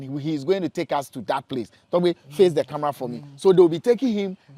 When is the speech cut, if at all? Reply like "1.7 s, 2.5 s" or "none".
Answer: none